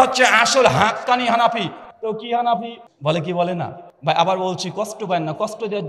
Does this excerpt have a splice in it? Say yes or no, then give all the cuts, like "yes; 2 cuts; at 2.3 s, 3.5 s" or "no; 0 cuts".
yes; 2 cuts; at 2.8 s, 3.9 s